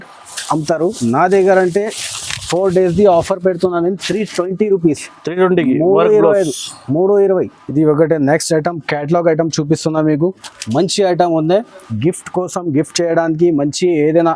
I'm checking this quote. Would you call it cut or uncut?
uncut